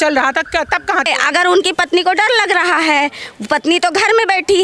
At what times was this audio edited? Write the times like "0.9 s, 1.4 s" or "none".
1.1 s